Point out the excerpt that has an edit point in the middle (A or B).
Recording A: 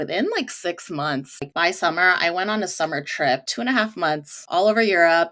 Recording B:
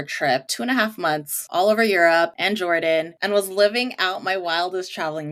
A